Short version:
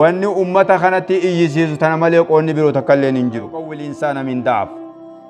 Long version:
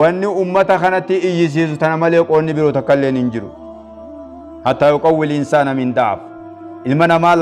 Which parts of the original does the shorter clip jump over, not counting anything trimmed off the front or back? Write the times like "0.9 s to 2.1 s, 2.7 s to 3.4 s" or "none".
3.8 s to 5.3 s

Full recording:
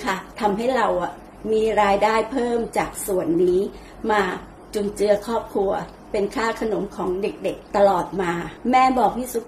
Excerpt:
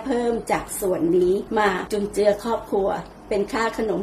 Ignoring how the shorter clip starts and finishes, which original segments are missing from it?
3.9 s to 4.4 s

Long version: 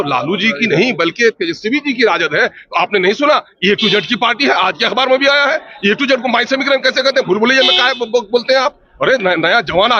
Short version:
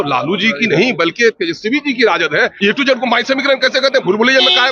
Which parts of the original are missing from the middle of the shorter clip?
2.5 s to 5.8 s

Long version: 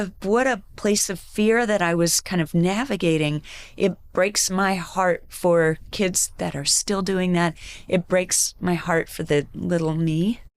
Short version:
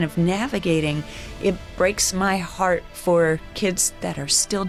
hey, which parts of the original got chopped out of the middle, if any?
none

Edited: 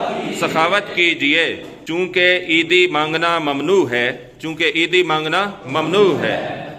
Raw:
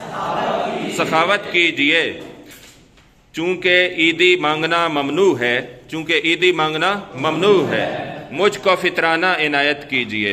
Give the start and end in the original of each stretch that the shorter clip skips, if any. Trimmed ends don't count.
2.3 s to 3.3 s

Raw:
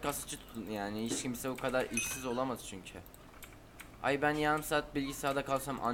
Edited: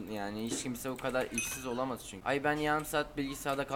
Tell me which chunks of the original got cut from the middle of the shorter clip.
2.7 s to 3.9 s

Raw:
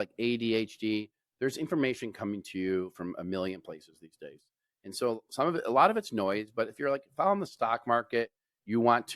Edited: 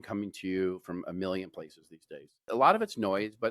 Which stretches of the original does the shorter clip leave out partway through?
4.6 s to 5.6 s

